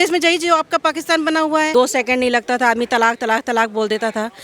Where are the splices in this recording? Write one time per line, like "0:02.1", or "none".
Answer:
0:01.7